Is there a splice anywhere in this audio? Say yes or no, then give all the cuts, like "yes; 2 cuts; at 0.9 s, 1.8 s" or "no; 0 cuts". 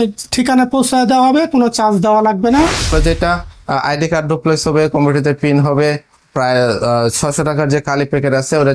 yes; 1 cut; at 2.9 s